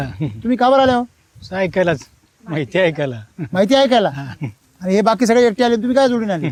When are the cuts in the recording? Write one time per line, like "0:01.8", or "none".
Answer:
none